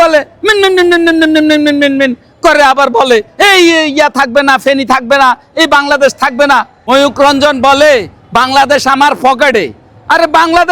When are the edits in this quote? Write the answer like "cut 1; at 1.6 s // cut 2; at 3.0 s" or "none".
cut 1; at 6.7 s